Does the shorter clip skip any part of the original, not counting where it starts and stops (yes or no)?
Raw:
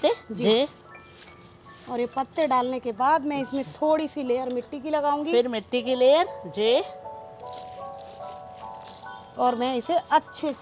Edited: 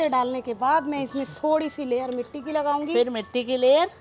no